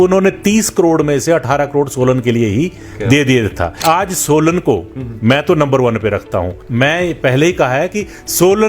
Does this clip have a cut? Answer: yes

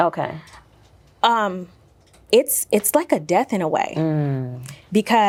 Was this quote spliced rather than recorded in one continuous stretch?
no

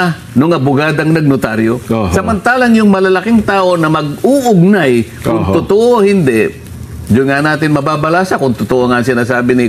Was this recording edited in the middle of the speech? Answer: no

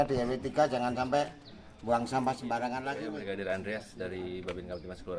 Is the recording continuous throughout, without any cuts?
no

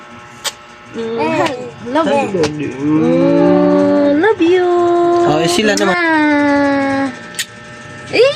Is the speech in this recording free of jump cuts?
no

